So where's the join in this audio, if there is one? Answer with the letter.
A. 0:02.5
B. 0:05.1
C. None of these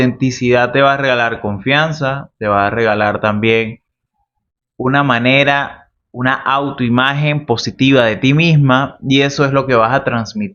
C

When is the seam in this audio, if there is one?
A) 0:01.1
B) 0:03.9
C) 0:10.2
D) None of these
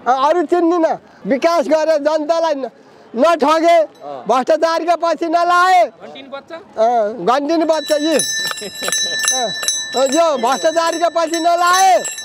A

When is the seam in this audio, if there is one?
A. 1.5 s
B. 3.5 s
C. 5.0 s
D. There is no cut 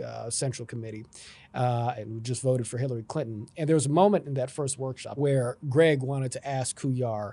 C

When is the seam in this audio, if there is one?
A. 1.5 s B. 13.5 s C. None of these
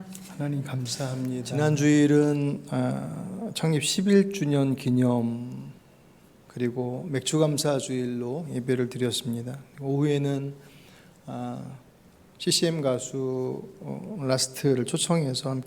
A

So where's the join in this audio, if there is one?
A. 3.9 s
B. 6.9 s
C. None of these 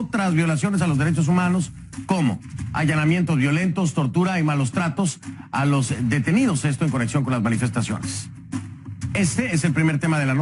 A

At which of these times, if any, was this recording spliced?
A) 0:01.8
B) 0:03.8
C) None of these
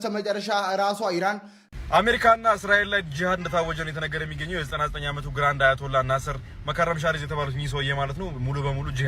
A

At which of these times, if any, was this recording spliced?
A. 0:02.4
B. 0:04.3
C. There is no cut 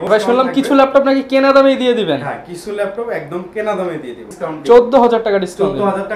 B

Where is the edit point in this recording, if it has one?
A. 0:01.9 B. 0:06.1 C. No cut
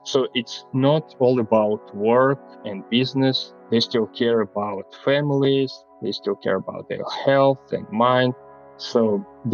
C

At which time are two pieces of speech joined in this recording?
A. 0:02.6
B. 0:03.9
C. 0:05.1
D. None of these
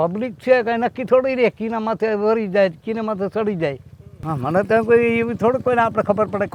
D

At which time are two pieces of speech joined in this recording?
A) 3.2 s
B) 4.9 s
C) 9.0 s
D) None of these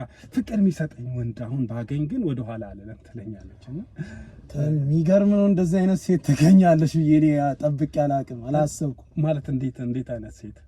C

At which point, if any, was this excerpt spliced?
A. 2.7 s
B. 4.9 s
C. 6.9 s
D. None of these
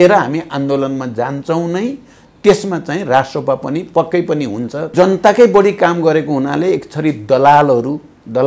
B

